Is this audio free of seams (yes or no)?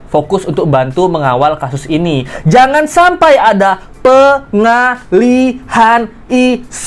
yes